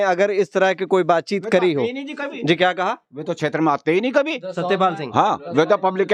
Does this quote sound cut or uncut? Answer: uncut